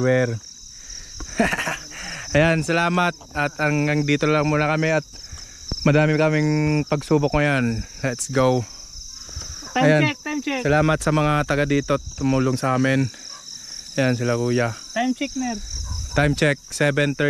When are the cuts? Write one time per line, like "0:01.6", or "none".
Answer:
none